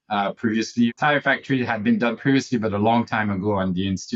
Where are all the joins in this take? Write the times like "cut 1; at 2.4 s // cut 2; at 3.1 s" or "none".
cut 1; at 0.9 s